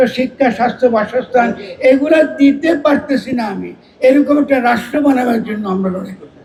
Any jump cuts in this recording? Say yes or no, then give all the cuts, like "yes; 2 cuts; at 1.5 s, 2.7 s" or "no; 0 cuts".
no; 0 cuts